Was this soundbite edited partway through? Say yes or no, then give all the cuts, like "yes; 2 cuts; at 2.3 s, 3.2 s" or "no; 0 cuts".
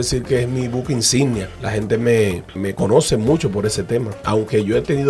yes; 3 cuts; at 1.6 s, 2.6 s, 4.2 s